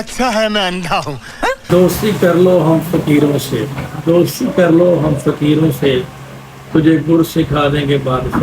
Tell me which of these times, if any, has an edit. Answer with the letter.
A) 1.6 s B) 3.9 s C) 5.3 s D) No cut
A